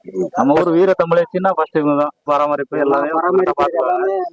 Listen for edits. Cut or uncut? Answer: cut